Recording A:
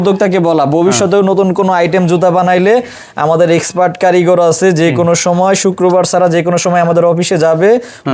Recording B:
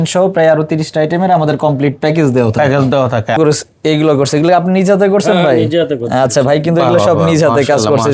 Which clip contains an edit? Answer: B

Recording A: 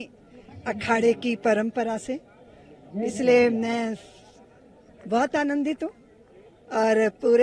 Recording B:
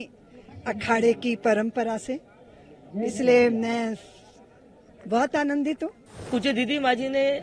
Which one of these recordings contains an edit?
B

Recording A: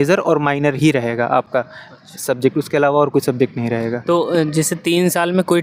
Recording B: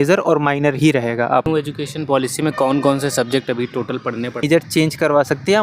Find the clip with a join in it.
B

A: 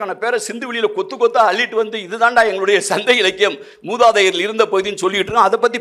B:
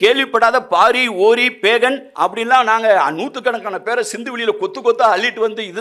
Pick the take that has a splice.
B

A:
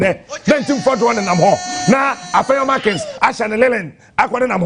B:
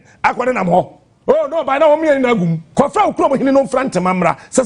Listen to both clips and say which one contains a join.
B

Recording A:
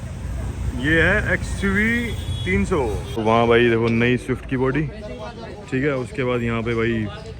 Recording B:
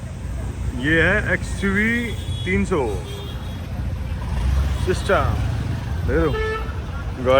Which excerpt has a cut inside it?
A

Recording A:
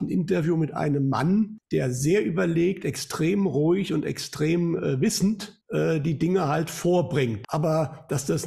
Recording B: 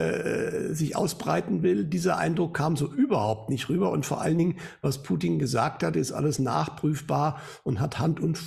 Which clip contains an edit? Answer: A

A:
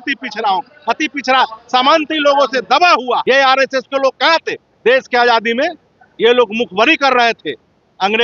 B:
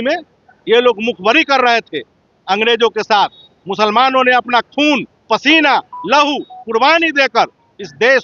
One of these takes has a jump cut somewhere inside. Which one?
A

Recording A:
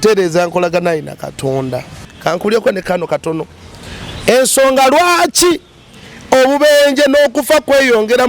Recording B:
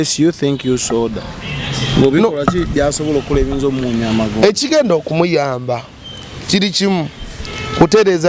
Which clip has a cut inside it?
A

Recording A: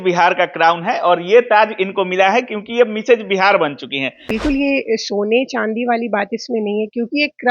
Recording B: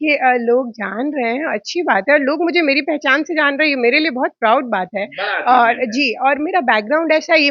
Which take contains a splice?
A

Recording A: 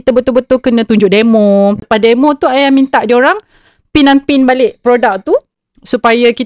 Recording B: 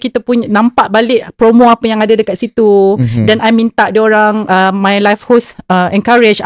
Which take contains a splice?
A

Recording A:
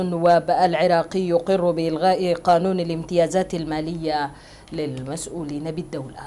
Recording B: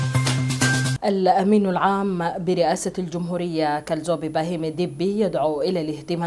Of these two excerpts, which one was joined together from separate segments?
B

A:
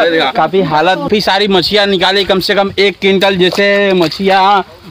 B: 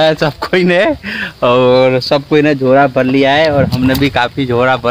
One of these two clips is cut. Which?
A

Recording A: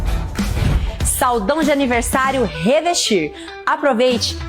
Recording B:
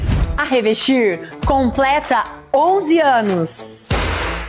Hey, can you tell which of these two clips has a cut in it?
B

